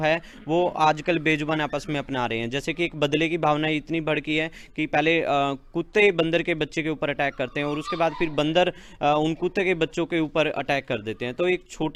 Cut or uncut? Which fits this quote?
uncut